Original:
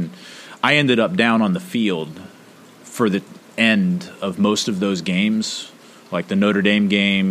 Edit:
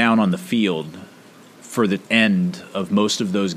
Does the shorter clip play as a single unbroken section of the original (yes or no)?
no